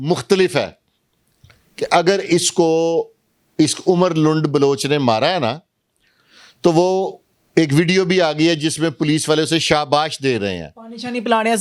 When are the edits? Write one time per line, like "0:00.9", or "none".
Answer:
none